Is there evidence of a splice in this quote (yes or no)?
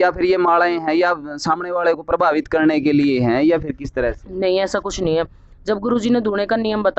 no